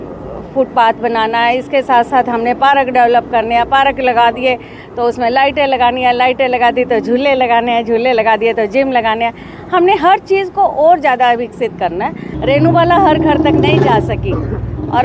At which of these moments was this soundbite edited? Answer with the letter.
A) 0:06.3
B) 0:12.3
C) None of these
B